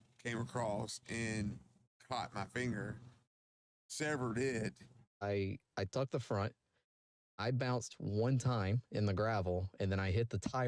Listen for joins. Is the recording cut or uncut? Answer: cut